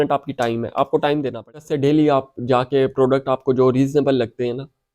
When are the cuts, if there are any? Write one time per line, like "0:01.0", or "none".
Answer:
0:01.7